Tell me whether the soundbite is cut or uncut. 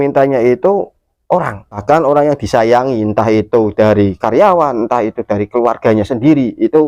cut